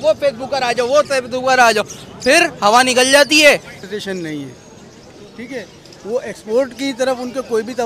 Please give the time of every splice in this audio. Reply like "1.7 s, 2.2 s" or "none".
3.8 s